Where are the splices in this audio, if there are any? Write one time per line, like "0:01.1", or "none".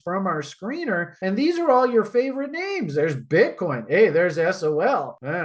0:01.1